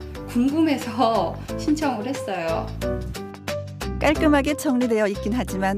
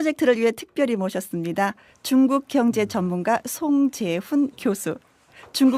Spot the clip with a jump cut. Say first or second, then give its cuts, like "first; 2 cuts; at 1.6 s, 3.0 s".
first; 1 cut; at 2.8 s